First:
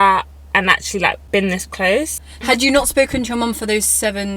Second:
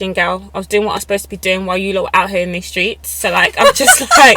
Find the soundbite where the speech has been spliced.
first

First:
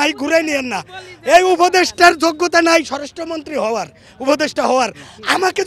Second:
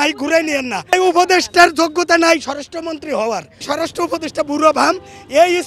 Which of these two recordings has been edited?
second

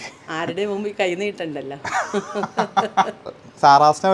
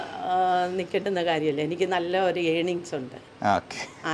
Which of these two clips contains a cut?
first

